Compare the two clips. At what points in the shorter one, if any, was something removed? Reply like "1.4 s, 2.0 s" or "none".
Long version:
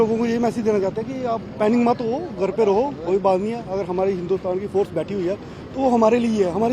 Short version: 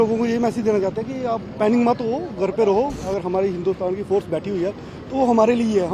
3.0 s